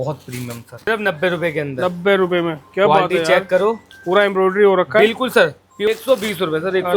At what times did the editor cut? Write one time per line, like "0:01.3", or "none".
0:00.9
0:05.7